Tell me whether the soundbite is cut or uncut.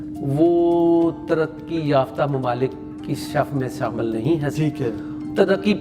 uncut